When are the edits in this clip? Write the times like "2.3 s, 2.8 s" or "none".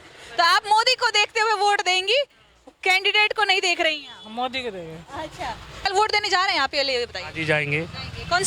5.9 s